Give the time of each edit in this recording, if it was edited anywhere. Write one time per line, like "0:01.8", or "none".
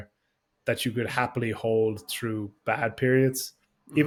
none